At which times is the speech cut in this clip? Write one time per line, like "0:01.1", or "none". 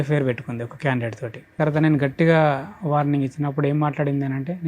0:01.5